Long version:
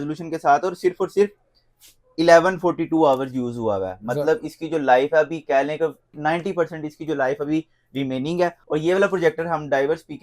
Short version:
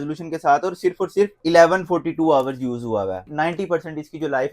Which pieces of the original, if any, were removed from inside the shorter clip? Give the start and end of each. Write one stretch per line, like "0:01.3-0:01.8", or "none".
0:01.4-0:02.1
0:03.9-0:06.1